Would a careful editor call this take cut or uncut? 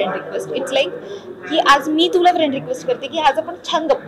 uncut